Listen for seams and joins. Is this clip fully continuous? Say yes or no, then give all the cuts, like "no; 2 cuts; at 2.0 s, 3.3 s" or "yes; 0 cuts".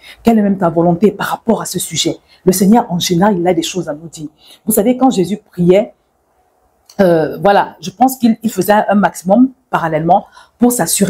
yes; 0 cuts